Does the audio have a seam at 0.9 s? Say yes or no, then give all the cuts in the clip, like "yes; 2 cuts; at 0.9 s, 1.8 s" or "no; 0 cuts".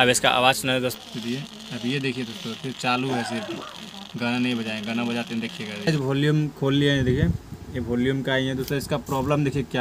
yes; 3 cuts; at 0.9 s, 5.9 s, 8.6 s